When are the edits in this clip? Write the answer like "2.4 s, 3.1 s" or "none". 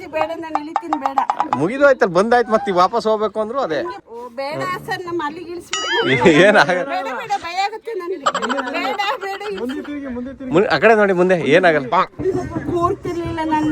4.0 s